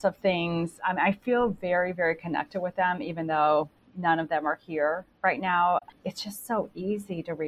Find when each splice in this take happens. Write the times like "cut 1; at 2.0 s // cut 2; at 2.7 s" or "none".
cut 1; at 5.9 s